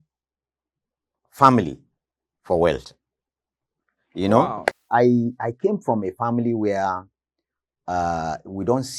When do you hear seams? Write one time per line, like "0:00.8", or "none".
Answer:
0:04.8